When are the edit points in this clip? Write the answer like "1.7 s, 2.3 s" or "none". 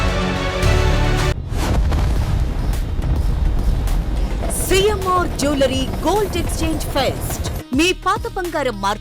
1.3 s